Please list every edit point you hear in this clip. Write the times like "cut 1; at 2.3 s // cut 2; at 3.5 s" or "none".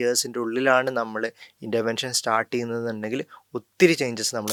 none